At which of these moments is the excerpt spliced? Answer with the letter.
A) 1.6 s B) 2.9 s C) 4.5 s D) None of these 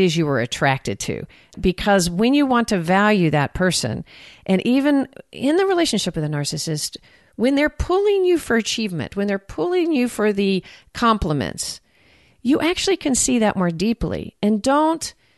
A